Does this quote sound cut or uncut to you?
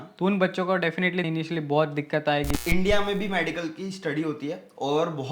cut